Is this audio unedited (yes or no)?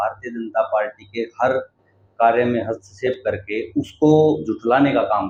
yes